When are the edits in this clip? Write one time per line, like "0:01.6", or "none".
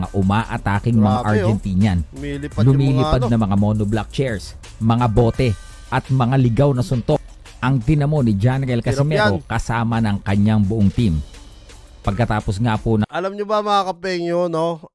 none